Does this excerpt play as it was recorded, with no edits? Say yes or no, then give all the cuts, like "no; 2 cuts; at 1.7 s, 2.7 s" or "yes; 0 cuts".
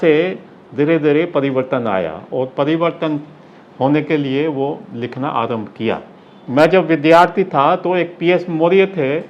yes; 0 cuts